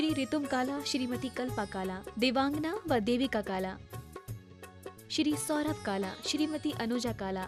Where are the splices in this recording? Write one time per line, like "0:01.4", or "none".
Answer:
none